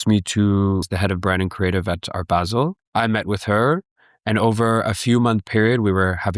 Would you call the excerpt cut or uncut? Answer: cut